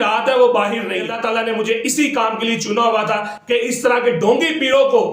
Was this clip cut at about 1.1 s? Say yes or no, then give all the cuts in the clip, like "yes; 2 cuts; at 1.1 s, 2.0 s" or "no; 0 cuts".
yes; 1 cut; at 1.1 s